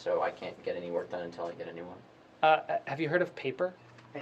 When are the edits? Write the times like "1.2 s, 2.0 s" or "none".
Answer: 1.3 s